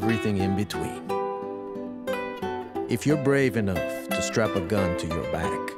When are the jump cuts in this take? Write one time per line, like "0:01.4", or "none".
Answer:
0:03.7

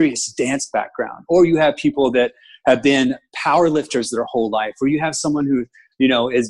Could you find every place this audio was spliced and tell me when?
none

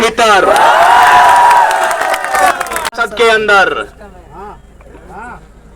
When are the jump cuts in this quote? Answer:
0:02.9

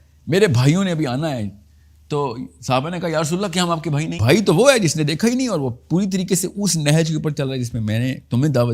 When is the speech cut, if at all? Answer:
0:04.2

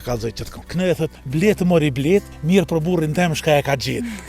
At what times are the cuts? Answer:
0:01.0
0:02.3

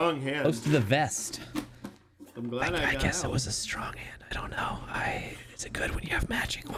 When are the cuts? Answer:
none

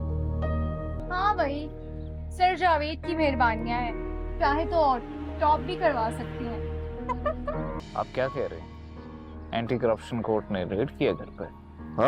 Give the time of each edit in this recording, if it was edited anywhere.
0:01.0
0:07.8

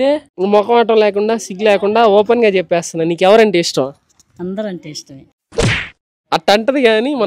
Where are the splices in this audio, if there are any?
none

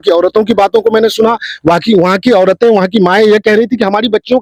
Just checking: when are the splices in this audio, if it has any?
none

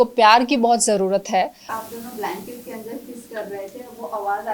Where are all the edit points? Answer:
0:01.6

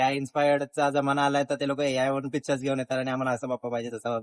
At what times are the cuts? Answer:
none

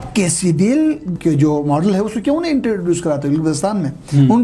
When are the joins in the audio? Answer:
0:01.1

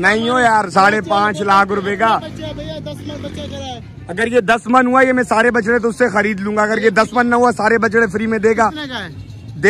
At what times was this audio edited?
none

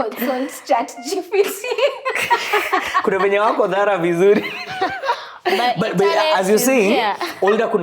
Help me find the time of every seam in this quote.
none

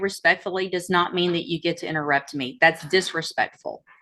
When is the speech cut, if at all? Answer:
none

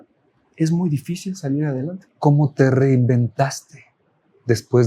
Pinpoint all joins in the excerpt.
0:02.0

